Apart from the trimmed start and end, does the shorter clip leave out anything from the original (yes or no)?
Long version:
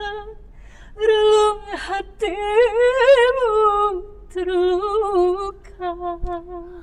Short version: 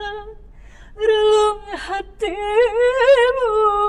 no